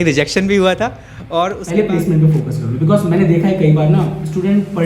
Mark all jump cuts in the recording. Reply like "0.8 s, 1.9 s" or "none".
1.6 s